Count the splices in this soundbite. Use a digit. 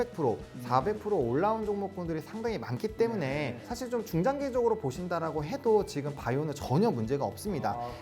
1